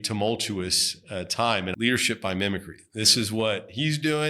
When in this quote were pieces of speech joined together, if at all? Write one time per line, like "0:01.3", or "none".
0:01.7